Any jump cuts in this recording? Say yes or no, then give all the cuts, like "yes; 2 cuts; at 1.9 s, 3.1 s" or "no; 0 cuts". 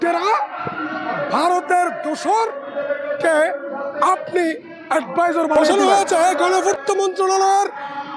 yes; 1 cut; at 5.7 s